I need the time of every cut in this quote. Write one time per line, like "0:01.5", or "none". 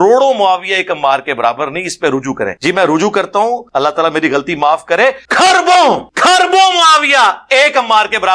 0:02.6
0:03.6
0:05.2
0:06.1